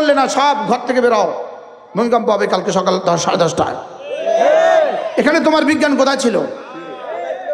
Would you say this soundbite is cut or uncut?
uncut